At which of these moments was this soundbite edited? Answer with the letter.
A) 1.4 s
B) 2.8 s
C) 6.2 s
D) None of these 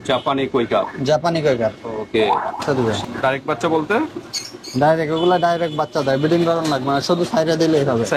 B